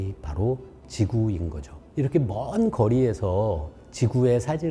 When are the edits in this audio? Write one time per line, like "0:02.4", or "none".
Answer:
none